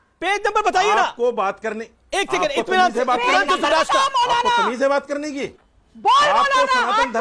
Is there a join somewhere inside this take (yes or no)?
yes